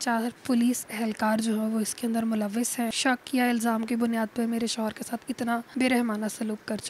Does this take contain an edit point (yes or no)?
yes